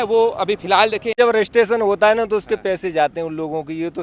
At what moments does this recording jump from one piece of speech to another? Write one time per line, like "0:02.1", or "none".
0:01.2